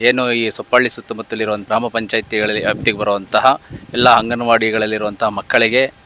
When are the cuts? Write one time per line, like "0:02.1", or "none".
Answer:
0:01.6